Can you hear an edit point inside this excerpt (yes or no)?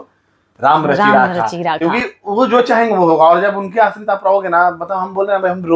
no